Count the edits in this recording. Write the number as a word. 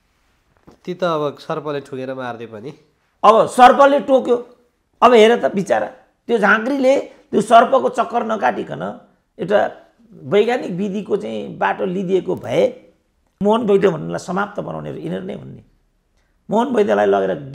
one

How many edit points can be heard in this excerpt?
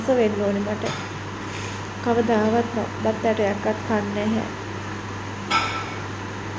zero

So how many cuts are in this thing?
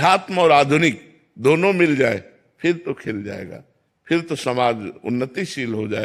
zero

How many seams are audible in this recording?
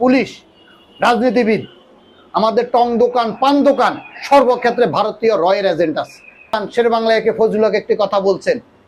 one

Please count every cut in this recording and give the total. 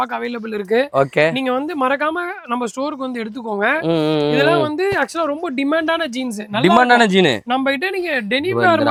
zero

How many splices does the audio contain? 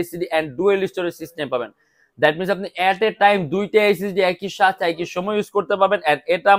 zero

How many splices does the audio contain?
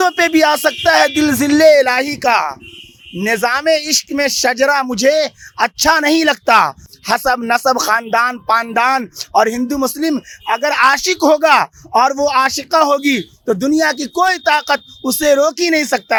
zero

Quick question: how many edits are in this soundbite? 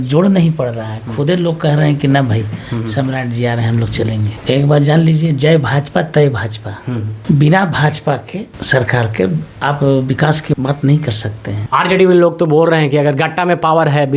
three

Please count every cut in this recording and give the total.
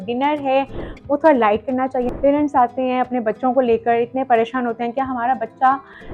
one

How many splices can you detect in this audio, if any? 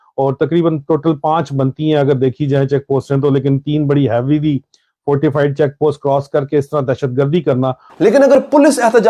one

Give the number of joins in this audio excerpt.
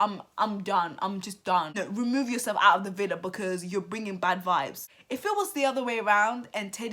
two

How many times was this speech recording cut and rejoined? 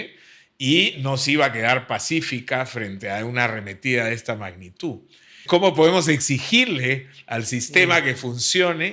one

